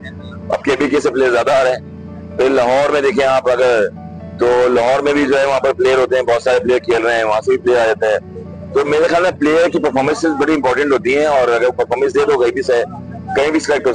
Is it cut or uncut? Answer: uncut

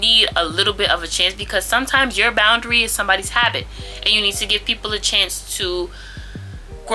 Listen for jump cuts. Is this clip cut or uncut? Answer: uncut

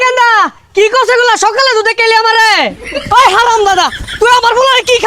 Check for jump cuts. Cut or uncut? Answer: cut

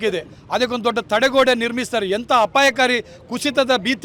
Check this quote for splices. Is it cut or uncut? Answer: uncut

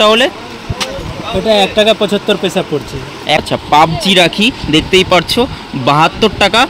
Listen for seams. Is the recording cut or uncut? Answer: cut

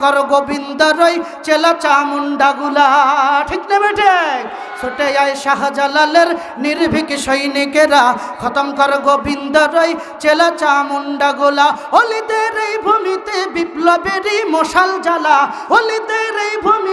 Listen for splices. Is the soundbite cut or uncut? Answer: uncut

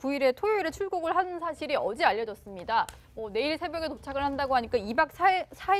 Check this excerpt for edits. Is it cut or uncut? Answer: uncut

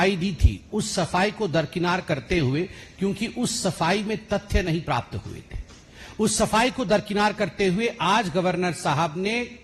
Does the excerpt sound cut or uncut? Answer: uncut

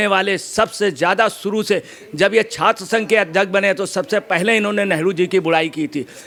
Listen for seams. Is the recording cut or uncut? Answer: uncut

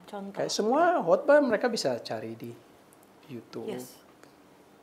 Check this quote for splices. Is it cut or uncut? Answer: uncut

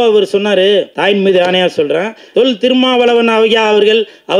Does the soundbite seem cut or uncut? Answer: cut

